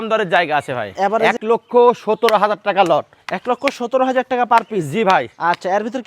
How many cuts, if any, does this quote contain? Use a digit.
1